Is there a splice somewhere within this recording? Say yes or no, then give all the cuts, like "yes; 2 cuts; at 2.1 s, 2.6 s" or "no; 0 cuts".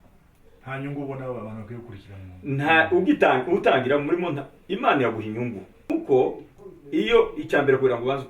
yes; 1 cut; at 5.9 s